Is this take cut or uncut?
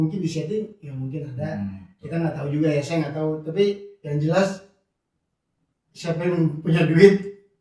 uncut